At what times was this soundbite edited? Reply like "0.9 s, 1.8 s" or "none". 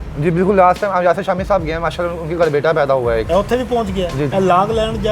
3.2 s, 4.3 s